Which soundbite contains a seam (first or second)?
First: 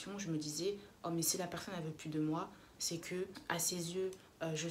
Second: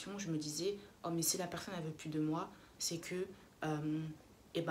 first